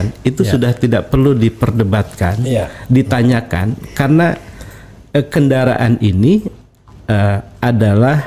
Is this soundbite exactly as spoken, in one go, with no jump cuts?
yes; 0 cuts

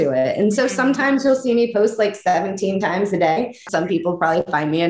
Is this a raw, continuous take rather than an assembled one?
no; 1 cut; at 3.6 s

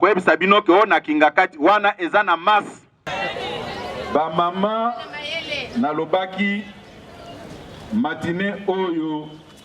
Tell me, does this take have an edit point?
yes; 1 cut; at 3.1 s

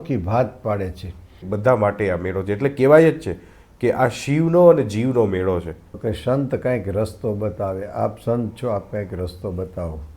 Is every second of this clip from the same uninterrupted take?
no; 2 cuts; at 1.5 s, 5.8 s

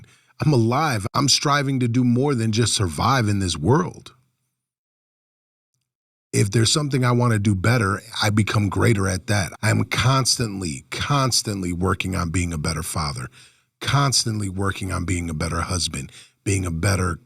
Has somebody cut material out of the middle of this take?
yes; 2 cuts; at 1.0 s, 9.5 s

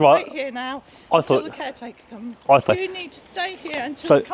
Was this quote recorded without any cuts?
no; 1 cut; at 2.7 s

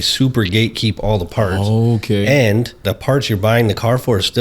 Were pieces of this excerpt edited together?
yes; 1 cut; at 2.8 s

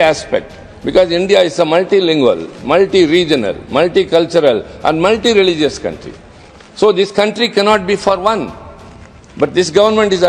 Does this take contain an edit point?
no; 0 cuts

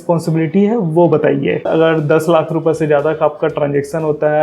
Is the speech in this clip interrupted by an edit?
yes; 1 cut; at 1.7 s

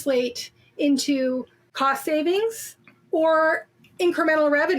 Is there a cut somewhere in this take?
yes; 1 cut; at 1.6 s

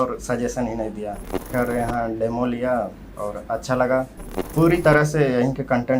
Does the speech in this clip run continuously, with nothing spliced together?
no; 2 cuts; at 1.5 s, 4.4 s

